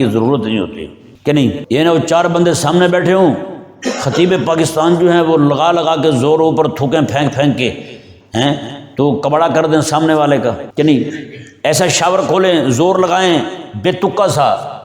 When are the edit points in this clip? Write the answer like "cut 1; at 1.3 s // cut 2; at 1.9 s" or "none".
cut 1; at 1.5 s // cut 2; at 10.6 s